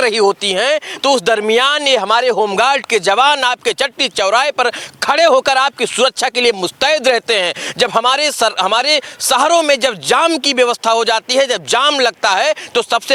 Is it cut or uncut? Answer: uncut